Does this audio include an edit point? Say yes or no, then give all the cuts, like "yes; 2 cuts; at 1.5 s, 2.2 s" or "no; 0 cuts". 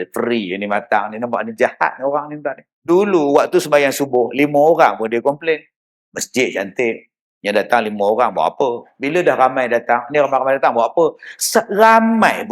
yes; 2 cuts; at 2.7 s, 8.9 s